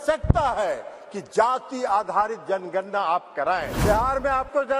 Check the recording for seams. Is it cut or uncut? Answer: cut